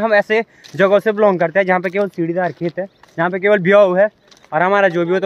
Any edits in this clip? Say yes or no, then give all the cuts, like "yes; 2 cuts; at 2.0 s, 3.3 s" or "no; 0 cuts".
no; 0 cuts